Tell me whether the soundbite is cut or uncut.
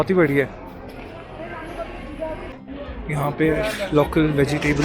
cut